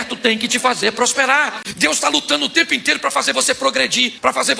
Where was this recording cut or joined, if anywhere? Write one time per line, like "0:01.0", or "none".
0:01.6